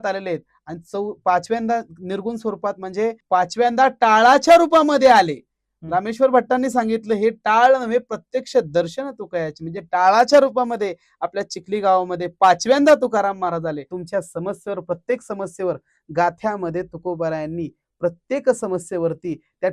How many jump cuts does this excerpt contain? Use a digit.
2